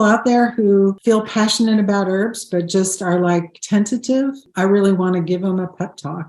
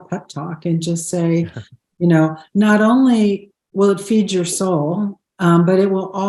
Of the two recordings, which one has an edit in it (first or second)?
first